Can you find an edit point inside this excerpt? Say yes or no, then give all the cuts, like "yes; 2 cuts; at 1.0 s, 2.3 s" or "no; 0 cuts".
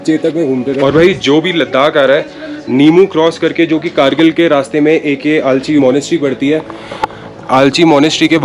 yes; 2 cuts; at 0.8 s, 5.8 s